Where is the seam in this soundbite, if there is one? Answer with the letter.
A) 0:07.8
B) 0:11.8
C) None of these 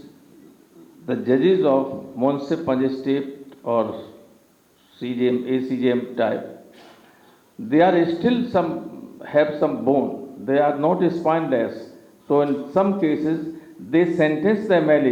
C